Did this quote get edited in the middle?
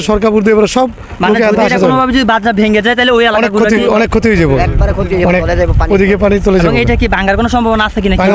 no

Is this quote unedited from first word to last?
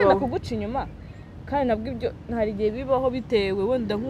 yes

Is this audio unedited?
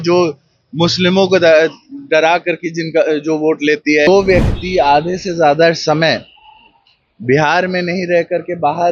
no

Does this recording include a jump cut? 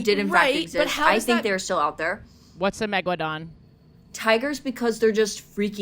no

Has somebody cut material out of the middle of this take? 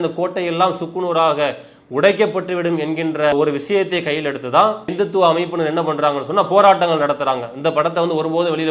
no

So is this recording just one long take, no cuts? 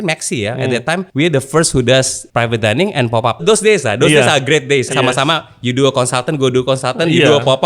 no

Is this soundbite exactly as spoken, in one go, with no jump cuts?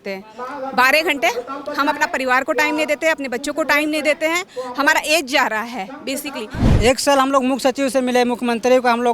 no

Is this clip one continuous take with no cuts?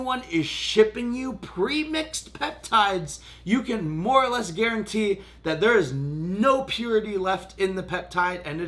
yes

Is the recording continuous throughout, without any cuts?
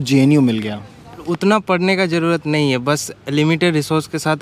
no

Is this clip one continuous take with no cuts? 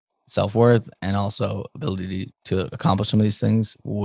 yes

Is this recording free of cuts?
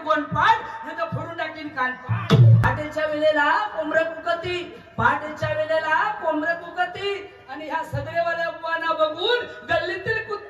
no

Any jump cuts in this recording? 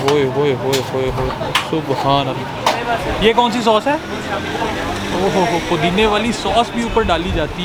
no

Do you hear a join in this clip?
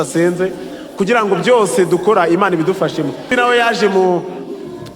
yes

